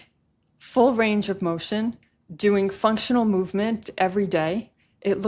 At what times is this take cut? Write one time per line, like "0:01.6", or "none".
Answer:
none